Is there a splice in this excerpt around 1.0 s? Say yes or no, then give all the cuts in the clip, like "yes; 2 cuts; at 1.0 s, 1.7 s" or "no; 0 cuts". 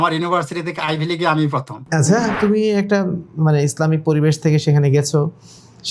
no; 1 cut; at 2.4 s